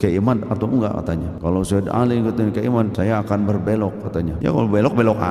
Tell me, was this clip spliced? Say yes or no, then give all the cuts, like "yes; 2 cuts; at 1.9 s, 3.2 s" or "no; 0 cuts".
yes; 3 cuts; at 1.3 s, 2.9 s, 4.3 s